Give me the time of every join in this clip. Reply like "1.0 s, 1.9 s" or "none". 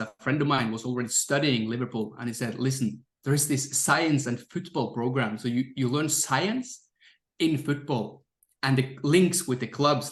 none

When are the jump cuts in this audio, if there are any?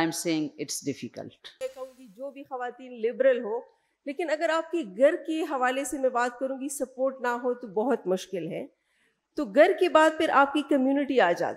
1.6 s

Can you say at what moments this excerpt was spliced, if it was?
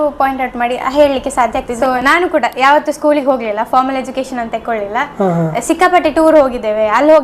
1.7 s, 5.5 s

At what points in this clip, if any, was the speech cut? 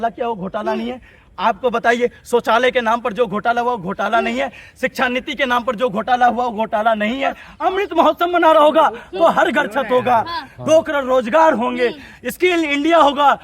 7.5 s

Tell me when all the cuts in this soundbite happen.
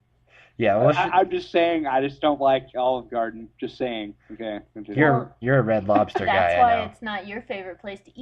2.7 s

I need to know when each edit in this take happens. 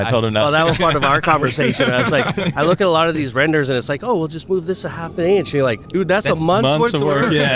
5.8 s

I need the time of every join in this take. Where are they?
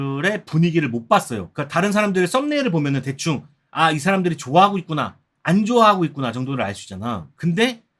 1.4 s

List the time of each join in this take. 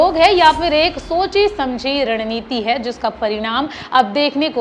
none

